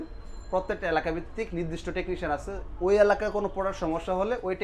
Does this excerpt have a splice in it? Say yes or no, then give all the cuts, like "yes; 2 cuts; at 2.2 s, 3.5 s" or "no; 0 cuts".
no; 0 cuts